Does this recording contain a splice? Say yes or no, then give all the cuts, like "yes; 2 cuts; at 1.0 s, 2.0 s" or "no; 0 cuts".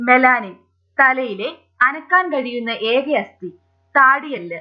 yes; 1 cut; at 2.5 s